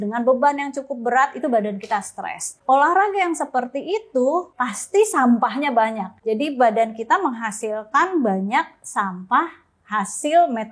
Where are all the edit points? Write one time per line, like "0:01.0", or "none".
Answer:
0:02.5
0:04.6
0:06.1